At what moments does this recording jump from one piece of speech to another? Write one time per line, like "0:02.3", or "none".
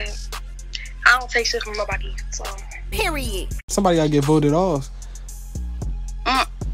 0:03.7